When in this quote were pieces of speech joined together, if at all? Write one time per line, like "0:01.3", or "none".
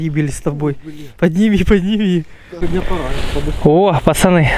0:02.4